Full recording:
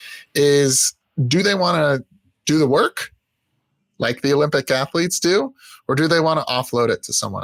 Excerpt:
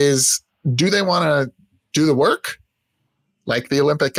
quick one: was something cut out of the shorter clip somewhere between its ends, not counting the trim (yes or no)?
no